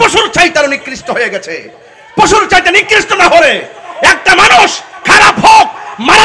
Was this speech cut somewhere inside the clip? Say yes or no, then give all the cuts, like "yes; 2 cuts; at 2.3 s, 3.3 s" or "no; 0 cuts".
no; 0 cuts